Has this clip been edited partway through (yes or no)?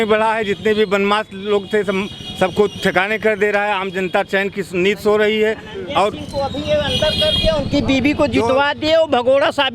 no